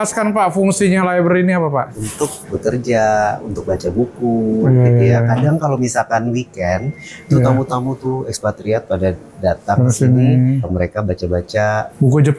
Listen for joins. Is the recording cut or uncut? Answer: uncut